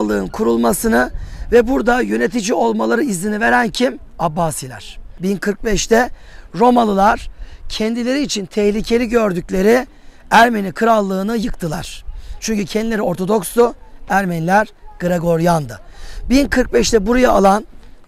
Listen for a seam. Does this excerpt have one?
yes; 1 cut; at 5.2 s

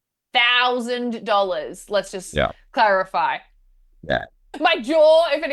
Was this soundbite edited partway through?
yes; 1 cut; at 4.4 s

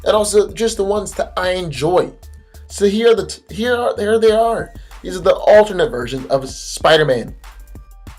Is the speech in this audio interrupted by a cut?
no; 0 cuts

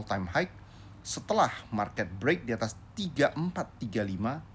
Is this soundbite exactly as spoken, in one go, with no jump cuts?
yes; 0 cuts

